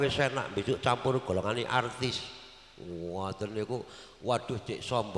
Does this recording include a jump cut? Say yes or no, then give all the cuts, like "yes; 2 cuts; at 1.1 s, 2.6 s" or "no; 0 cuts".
no; 0 cuts